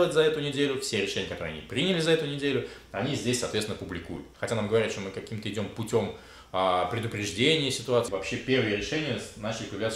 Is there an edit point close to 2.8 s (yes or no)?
no